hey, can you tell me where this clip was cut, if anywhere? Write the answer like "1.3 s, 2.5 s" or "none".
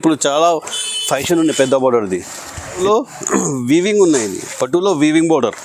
2.8 s